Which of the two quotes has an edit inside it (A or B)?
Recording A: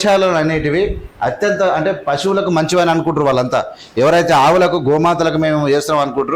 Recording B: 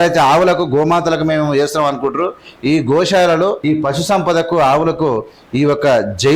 B